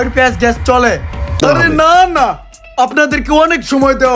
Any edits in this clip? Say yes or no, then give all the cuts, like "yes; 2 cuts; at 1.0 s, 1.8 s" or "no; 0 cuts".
yes; 1 cut; at 1.3 s